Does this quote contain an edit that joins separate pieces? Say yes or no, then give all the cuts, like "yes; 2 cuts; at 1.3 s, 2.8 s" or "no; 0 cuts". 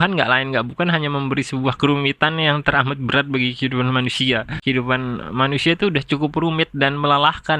yes; 1 cut; at 4.6 s